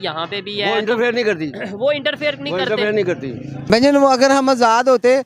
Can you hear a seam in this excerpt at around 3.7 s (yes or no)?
yes